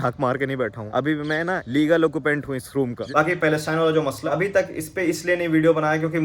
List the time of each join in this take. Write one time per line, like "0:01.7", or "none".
0:03.1
0:04.2